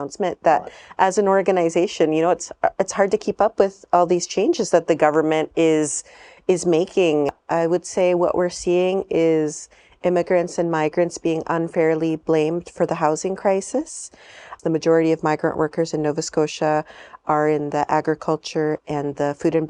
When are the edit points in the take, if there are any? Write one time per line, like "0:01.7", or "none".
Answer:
0:07.4
0:14.5